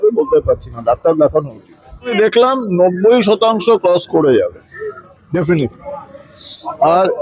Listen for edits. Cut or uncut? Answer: uncut